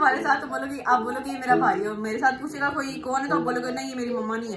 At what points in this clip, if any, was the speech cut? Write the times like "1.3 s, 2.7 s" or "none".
none